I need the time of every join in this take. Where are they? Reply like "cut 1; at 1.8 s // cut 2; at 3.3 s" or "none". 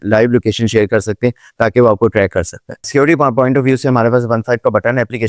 cut 1; at 2.8 s